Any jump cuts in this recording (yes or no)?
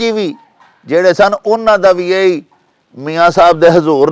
no